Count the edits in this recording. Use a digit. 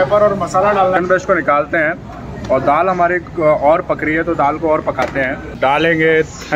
2